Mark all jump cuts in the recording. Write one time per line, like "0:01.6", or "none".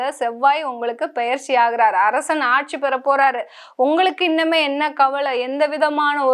none